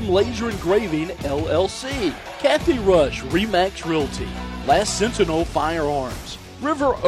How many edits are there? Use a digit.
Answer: 1